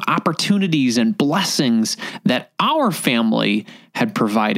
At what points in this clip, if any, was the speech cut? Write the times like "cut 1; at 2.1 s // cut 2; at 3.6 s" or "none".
none